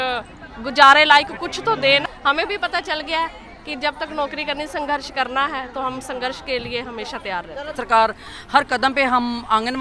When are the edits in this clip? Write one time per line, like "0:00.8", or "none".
0:02.0
0:07.7